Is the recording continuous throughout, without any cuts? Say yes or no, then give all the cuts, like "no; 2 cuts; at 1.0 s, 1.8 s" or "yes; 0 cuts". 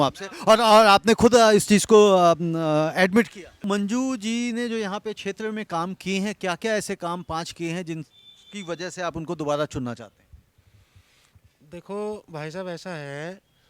no; 1 cut; at 3.6 s